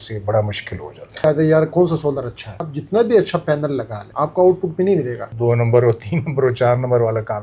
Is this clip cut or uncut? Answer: cut